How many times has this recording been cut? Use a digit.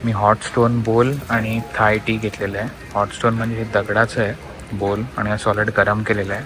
0